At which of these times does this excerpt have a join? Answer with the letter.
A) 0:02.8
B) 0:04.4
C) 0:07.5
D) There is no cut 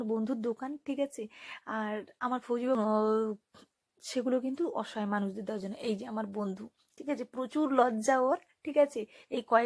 A